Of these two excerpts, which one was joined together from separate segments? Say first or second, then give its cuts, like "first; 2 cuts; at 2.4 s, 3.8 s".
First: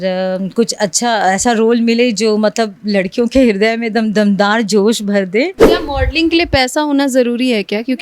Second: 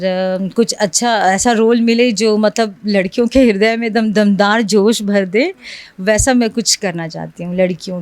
first; 1 cut; at 5.7 s